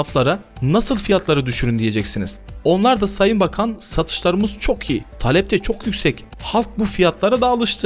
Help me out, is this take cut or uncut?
cut